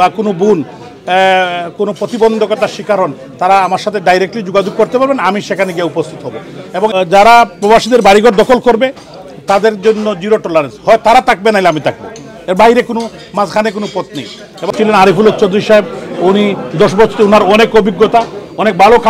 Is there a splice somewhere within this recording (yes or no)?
yes